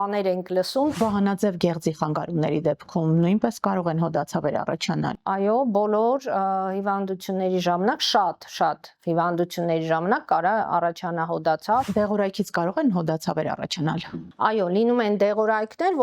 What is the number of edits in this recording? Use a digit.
2